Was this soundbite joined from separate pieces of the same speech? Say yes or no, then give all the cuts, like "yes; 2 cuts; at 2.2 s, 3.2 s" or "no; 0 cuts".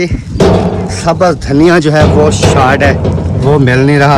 no; 0 cuts